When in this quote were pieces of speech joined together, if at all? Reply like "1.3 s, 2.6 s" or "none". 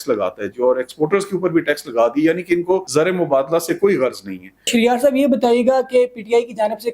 2.9 s, 4.7 s